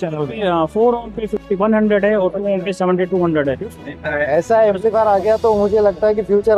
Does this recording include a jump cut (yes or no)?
yes